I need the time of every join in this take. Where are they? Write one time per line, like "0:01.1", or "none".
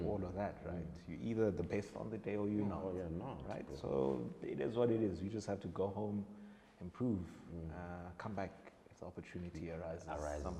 none